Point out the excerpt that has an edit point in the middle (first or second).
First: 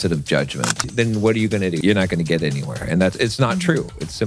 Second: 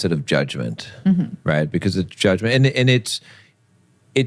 first